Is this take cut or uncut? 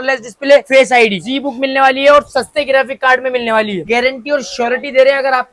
cut